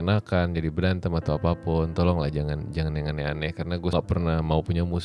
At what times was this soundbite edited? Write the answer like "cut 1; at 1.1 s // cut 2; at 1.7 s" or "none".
cut 1; at 3.9 s